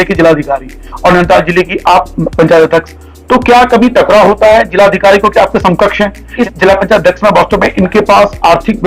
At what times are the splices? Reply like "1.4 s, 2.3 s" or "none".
6.3 s

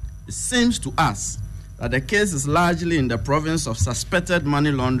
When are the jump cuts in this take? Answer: none

